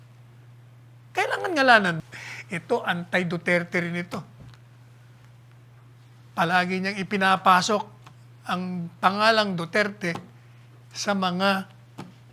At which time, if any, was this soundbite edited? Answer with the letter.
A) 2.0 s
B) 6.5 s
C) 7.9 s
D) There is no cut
A